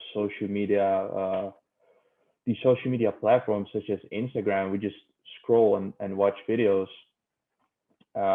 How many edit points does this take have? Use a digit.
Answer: 0